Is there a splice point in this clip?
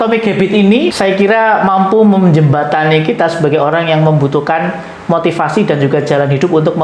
yes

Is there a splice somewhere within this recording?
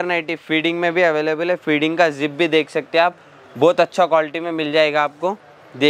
no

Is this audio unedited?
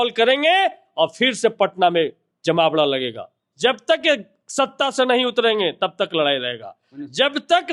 yes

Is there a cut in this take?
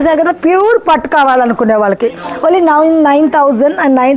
no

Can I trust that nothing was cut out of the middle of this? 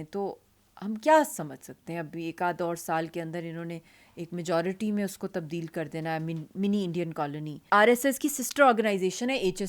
no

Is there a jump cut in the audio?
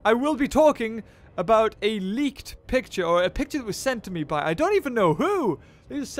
no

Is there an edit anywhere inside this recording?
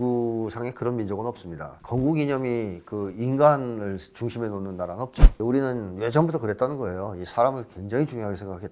no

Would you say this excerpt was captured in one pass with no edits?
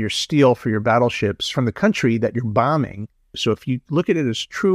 no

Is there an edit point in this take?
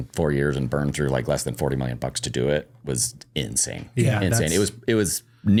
no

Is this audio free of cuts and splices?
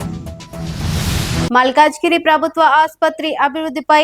no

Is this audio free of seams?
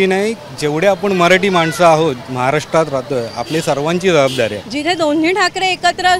no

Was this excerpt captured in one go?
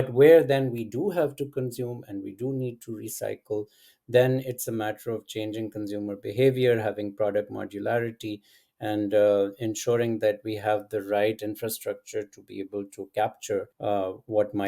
no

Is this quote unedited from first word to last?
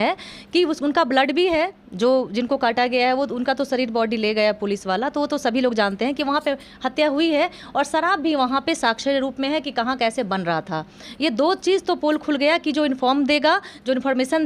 yes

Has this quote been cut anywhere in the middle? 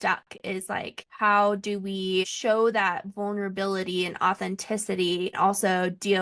yes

